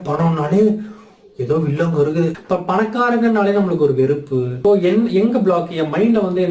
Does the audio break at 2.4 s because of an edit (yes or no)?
yes